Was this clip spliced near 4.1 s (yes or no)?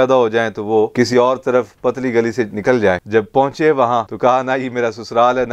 yes